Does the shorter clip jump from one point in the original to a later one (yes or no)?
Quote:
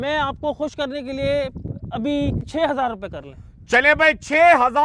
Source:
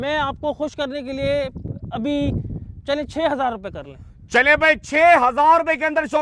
yes